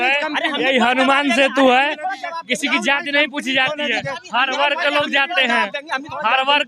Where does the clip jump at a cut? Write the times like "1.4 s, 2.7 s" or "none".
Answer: none